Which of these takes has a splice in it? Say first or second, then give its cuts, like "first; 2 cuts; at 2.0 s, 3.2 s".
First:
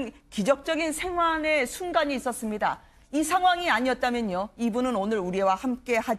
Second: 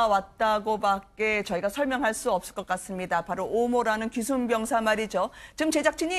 second; 1 cut; at 2.5 s